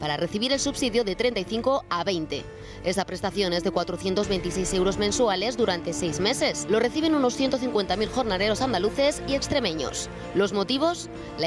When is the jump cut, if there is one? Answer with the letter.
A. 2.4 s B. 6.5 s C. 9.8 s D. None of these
D